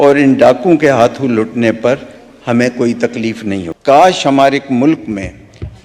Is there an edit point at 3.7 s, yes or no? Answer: yes